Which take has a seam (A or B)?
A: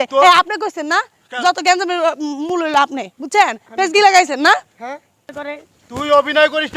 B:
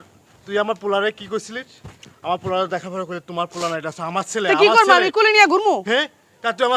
A